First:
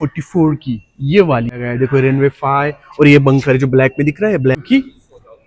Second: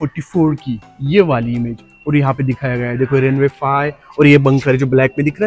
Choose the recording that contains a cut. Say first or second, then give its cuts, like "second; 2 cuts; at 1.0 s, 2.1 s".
first; 2 cuts; at 1.5 s, 4.6 s